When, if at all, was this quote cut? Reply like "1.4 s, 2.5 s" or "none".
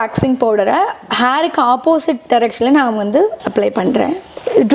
3.4 s